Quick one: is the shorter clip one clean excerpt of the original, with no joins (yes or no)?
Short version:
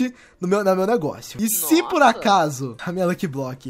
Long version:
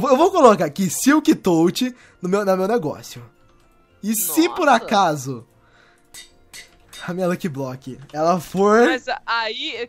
no